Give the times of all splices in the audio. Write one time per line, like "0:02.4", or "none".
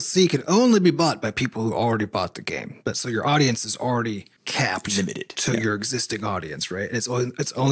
none